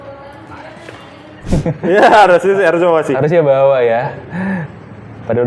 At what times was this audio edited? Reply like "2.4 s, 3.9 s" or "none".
1.4 s